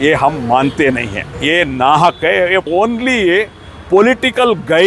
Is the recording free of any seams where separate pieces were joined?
no; 2 cuts; at 1.2 s, 2.7 s

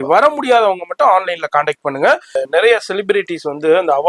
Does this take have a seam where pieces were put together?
yes; 1 cut; at 2.4 s

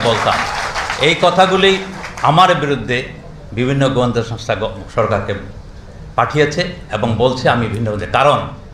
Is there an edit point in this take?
no; 0 cuts

